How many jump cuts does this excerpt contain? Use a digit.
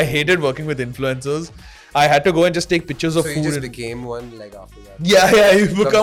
0